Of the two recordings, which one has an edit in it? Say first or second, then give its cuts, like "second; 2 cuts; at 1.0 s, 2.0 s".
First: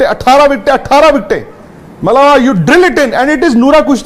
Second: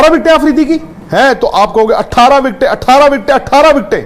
second; 1 cut; at 1.0 s